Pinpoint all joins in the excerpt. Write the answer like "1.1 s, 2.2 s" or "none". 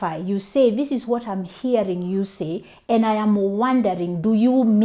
none